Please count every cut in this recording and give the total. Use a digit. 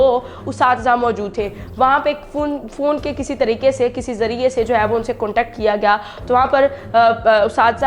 0